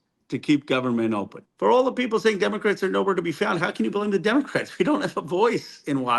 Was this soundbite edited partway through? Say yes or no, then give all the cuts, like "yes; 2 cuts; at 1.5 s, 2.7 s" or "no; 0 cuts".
yes; 1 cut; at 1.4 s